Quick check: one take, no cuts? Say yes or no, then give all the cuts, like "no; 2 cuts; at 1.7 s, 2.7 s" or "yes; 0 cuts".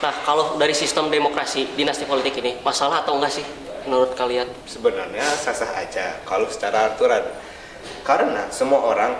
yes; 0 cuts